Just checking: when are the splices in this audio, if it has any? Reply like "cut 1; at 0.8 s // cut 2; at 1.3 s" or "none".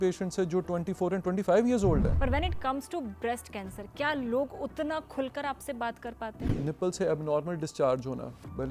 cut 1; at 2.1 s // cut 2; at 6.4 s